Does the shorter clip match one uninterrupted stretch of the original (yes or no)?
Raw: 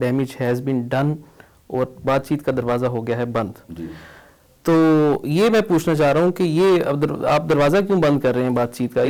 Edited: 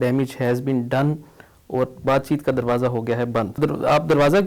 no